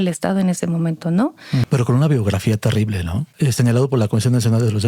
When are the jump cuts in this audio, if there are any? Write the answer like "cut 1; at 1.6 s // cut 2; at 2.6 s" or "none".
cut 1; at 1.6 s // cut 2; at 3.2 s